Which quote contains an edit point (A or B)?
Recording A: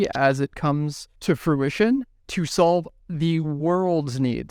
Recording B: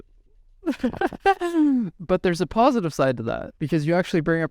B